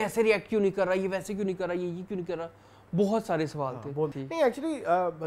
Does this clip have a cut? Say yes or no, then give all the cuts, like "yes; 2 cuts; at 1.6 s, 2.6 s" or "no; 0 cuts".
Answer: yes; 1 cut; at 4.2 s